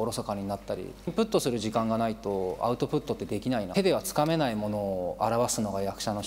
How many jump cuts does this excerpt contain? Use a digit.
2